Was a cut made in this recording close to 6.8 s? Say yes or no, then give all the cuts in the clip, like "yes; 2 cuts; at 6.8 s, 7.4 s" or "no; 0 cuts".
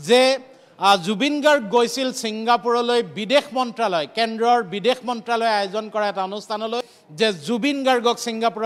yes; 1 cut; at 6.8 s